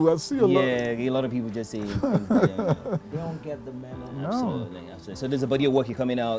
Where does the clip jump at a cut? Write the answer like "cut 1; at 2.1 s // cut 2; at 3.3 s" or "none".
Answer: none